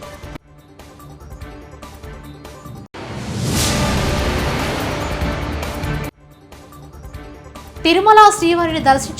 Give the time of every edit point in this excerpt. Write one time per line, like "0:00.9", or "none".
0:07.6

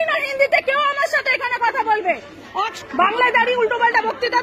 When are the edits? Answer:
0:02.7

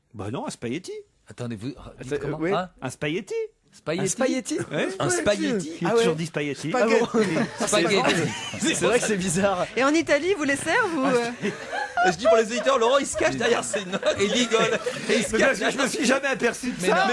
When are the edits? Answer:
0:01.5

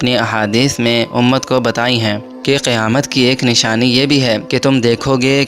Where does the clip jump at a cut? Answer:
0:02.3
0:04.4

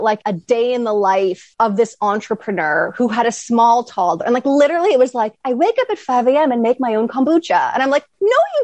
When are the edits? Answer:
0:01.4

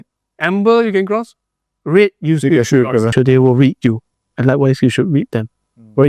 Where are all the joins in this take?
0:03.1

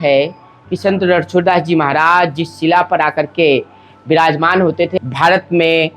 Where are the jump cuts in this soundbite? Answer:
0:04.9

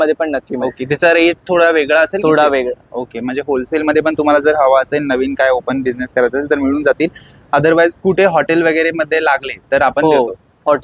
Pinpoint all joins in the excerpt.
none

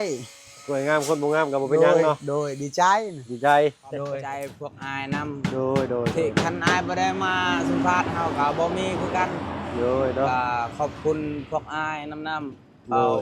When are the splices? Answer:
0:04.6

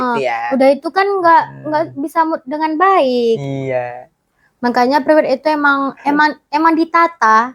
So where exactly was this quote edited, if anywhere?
none

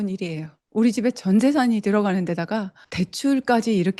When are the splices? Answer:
none

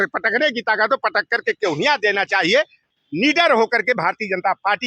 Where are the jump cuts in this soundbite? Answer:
0:02.8

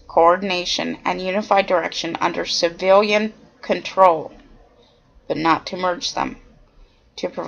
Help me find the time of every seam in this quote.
0:05.6

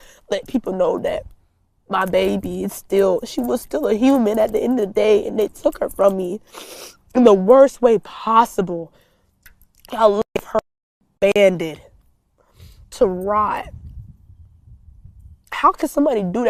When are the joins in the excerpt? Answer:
none

